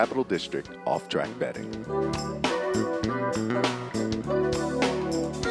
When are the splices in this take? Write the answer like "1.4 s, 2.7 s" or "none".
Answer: none